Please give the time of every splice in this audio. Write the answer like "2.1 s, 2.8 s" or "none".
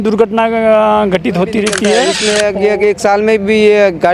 2.1 s